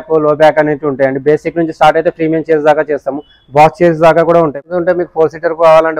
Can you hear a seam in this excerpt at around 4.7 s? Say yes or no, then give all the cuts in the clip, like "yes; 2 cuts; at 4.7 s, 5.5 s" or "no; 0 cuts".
yes; 1 cut; at 4.7 s